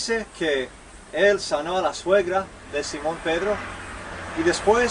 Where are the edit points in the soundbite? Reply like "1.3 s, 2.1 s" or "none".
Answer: 1.3 s